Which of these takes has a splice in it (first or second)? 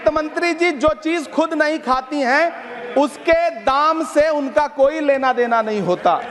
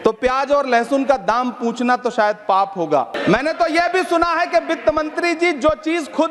second